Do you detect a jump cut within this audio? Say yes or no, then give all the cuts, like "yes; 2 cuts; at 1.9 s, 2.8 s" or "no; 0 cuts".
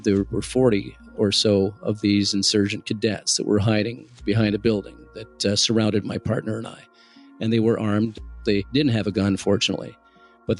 yes; 1 cut; at 8.6 s